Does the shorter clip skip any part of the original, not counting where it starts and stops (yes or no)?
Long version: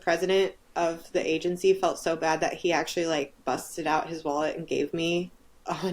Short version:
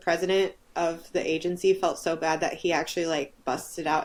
no